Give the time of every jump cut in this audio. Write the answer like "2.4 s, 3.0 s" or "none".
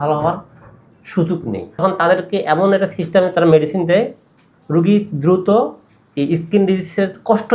1.8 s